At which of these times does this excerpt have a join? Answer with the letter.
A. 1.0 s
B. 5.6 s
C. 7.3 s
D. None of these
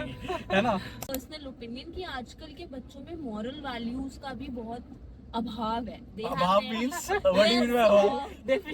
A